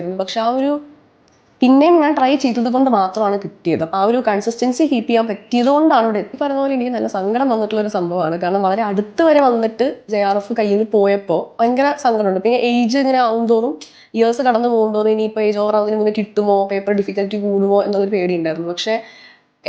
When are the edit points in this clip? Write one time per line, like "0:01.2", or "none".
0:06.4